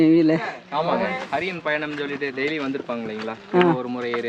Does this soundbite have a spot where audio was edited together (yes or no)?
no